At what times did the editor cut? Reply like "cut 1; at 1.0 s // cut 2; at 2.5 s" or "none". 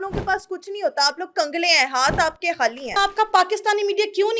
cut 1; at 2.9 s